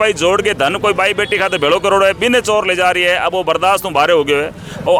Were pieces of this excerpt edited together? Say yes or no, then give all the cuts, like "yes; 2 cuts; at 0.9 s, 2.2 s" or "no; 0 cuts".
no; 0 cuts